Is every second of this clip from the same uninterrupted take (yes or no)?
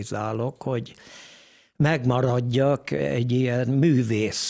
yes